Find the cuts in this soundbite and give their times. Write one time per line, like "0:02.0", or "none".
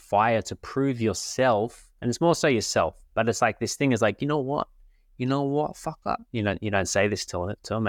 none

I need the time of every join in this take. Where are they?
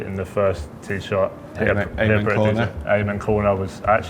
none

